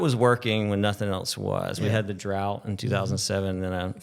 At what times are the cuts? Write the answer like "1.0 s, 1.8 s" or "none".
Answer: none